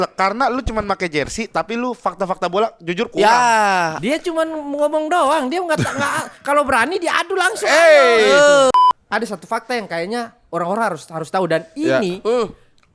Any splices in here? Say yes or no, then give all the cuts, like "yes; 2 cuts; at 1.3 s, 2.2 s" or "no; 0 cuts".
yes; 1 cut; at 8.7 s